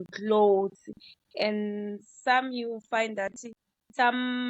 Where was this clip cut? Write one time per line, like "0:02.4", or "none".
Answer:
none